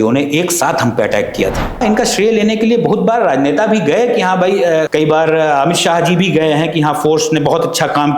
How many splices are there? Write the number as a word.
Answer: two